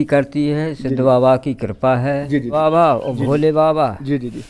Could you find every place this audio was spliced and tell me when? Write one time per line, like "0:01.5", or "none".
0:02.6